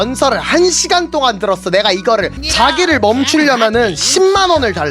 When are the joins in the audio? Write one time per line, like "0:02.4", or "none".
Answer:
0:02.3